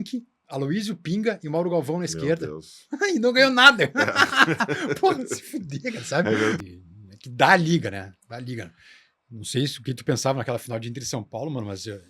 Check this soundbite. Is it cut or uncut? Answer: cut